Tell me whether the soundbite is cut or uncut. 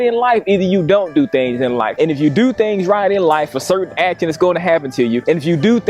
uncut